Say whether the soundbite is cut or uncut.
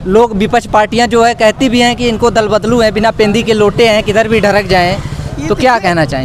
uncut